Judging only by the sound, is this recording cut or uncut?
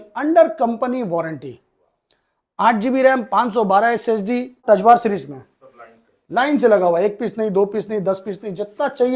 cut